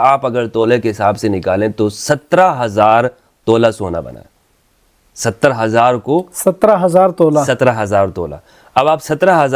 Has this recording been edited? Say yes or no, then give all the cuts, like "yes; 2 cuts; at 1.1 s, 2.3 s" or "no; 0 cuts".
no; 0 cuts